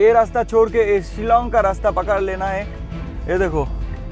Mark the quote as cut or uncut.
uncut